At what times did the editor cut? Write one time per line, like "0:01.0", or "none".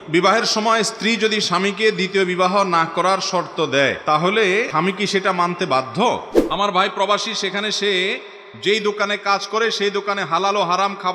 0:04.0
0:04.7
0:06.3